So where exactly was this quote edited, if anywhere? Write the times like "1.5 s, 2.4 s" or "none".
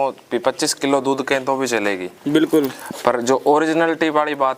none